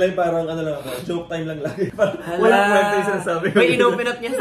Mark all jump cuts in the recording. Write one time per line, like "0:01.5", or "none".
none